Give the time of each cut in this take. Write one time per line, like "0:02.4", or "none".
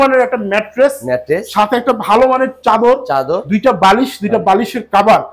none